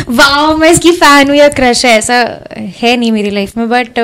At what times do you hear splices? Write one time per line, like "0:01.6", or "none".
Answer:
none